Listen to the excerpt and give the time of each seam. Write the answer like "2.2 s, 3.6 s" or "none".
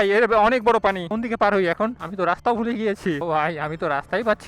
1.1 s, 2.0 s, 3.2 s